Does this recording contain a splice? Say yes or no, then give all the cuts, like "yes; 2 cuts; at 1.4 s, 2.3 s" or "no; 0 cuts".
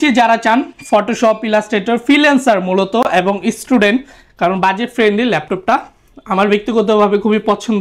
no; 0 cuts